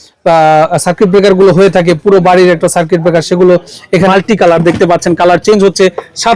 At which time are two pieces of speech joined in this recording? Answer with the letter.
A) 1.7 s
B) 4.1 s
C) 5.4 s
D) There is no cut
B